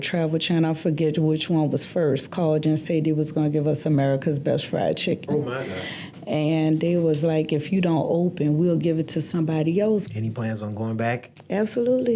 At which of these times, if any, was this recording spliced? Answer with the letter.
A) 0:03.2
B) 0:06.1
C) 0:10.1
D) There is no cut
C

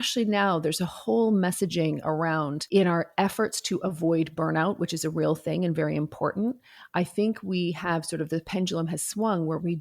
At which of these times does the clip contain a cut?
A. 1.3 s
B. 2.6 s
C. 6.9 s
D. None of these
B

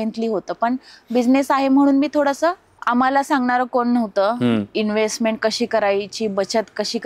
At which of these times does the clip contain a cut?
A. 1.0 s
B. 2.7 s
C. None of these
B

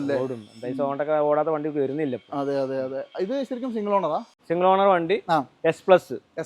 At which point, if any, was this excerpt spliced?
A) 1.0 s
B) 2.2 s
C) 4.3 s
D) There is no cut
C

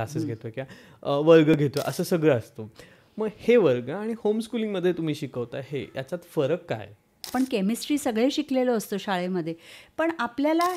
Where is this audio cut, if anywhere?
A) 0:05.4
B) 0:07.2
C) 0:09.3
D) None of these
B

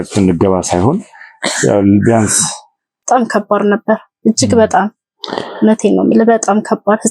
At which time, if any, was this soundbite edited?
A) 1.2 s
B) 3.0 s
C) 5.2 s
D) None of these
B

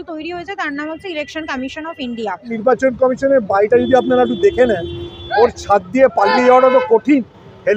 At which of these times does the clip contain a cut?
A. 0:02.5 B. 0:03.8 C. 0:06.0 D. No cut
A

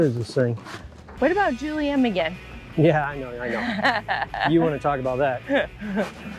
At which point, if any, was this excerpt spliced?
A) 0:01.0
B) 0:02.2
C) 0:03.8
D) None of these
A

